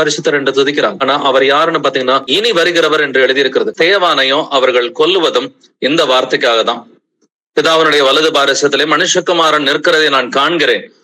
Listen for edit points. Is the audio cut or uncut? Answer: cut